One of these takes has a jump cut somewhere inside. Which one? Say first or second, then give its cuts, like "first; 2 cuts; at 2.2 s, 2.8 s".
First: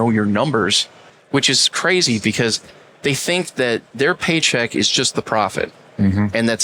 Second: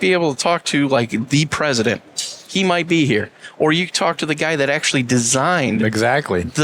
first; 2 cuts; at 1.2 s, 3.9 s